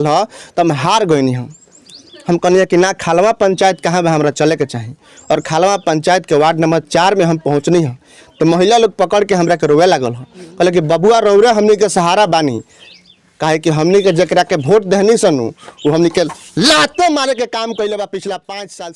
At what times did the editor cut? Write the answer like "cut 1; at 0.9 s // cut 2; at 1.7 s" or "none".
none

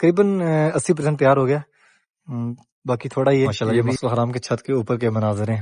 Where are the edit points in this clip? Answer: cut 1; at 3.8 s

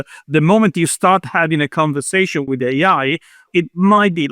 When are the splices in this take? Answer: cut 1; at 2.5 s // cut 2; at 3.5 s

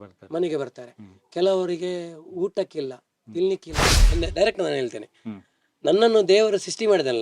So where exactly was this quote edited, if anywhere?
cut 1; at 4.0 s

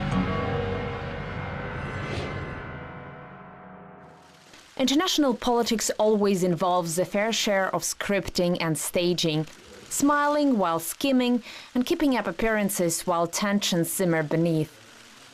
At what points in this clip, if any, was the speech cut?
none

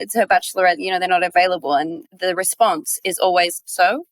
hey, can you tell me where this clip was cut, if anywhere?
none

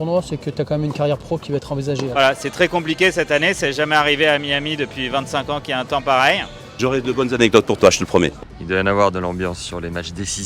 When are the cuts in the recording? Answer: cut 1; at 2.1 s // cut 2; at 6.7 s // cut 3; at 8.4 s

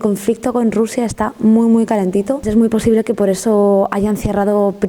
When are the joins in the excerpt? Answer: cut 1; at 2.4 s

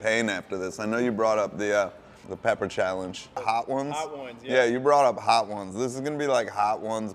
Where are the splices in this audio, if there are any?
cut 1; at 2.3 s // cut 2; at 3.4 s

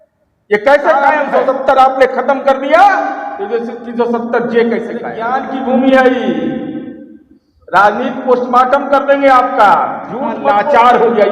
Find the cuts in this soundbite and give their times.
cut 1; at 1.1 s // cut 2; at 5.4 s // cut 3; at 10.5 s

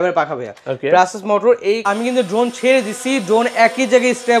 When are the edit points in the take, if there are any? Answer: cut 1; at 1.8 s

